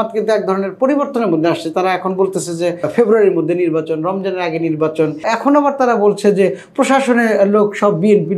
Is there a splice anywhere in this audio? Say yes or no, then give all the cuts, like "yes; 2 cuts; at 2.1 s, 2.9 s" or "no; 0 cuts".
yes; 2 cuts; at 2.9 s, 5.2 s